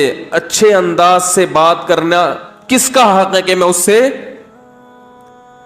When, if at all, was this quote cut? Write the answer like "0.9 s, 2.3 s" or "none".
4.4 s